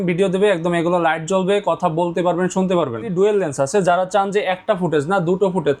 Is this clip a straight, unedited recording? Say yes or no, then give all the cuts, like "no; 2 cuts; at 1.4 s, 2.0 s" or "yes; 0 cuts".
no; 1 cut; at 3.1 s